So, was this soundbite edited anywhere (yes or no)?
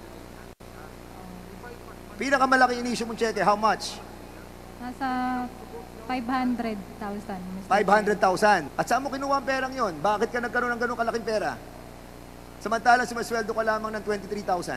yes